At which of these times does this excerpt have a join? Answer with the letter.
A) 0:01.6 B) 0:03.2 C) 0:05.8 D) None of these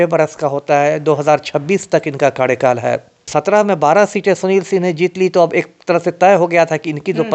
B